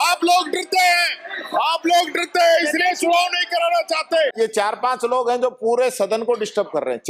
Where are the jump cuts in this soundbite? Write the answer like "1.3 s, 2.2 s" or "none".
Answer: 4.3 s